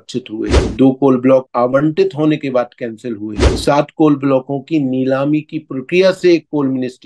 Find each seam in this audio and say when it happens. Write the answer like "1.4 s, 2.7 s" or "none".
none